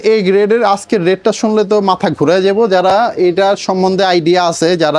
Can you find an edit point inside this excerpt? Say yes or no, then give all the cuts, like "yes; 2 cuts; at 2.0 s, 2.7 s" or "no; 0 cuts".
no; 0 cuts